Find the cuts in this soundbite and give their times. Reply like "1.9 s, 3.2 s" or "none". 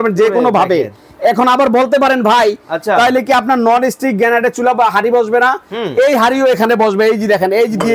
none

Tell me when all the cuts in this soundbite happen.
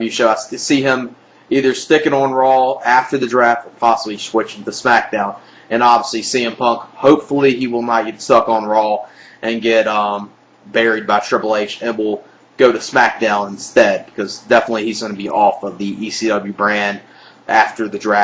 none

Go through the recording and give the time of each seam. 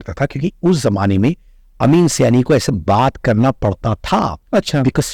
none

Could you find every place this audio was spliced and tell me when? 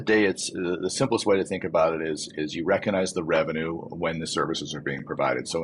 none

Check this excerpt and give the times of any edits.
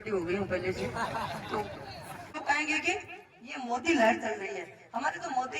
2.3 s

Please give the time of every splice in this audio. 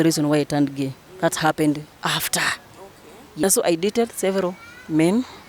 3.4 s

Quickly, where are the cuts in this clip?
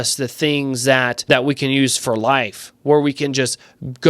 1.2 s

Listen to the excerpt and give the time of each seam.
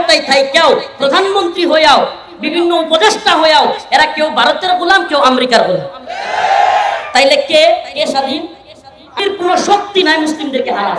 9.2 s

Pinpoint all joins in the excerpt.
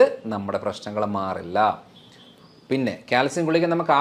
none

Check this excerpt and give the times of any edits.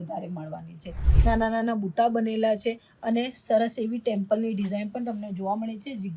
1.1 s

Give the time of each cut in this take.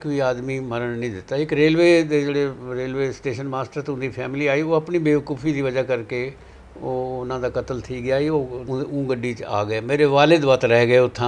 8.6 s

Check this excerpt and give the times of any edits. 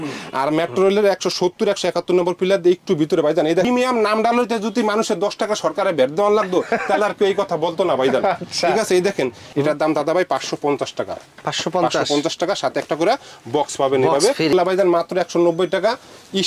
3.6 s, 9.4 s, 14.5 s

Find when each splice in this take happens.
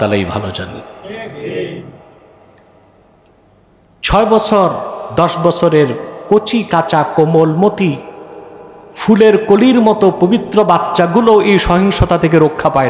none

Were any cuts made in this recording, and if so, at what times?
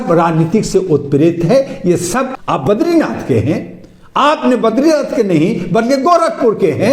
2.4 s

